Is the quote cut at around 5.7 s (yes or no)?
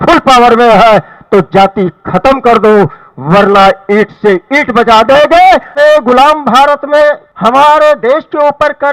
yes